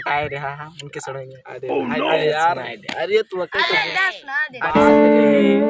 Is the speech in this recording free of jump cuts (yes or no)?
yes